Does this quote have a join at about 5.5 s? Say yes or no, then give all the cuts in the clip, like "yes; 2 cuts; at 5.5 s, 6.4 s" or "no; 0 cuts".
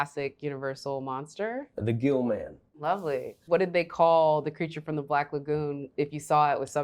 no; 2 cuts; at 1.8 s, 3.1 s